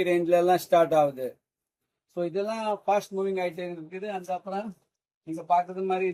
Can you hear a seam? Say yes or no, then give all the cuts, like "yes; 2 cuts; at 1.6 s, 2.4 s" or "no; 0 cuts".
no; 0 cuts